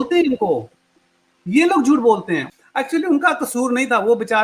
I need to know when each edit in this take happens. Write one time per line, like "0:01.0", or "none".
0:02.5